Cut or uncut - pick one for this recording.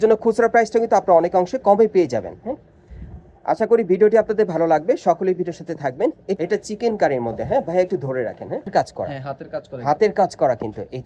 cut